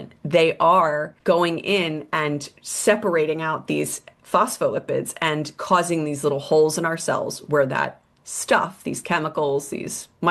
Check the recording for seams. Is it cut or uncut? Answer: cut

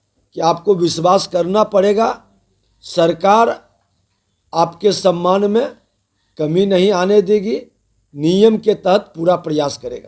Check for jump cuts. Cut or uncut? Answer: uncut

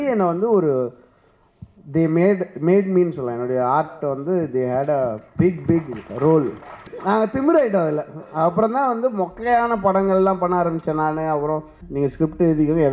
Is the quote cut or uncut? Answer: cut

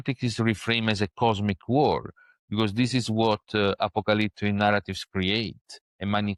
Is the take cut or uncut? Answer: uncut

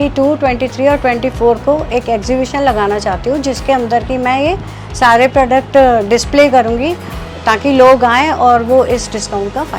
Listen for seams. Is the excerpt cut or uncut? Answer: uncut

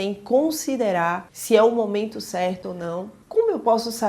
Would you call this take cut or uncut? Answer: cut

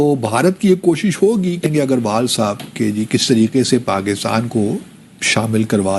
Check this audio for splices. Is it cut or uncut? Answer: cut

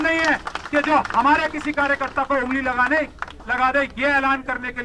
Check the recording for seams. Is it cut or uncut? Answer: uncut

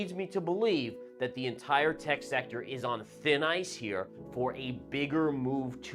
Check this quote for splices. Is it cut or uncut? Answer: uncut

